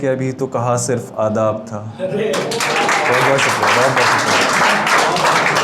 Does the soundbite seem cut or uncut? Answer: cut